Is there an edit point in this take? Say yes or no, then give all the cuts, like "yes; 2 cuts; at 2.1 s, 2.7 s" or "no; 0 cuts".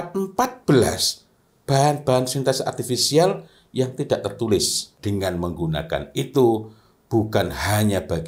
yes; 1 cut; at 4.8 s